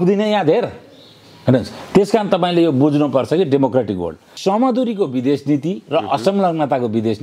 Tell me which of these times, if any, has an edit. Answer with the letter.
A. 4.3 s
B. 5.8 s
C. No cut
A